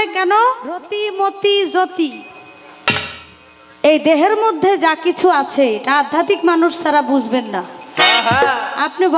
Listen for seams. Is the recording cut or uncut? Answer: cut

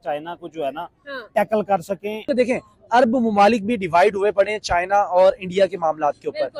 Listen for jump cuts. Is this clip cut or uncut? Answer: cut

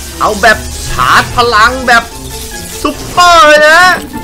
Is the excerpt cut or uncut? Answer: uncut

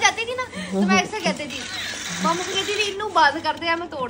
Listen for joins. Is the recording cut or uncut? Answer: uncut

